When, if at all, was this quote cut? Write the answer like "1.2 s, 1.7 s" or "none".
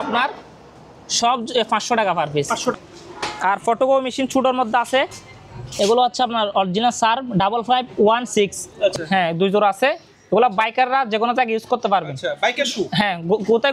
2.7 s, 8.9 s